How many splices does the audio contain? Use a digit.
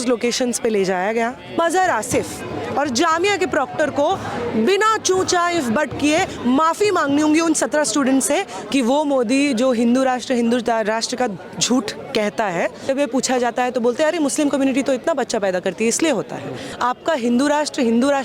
4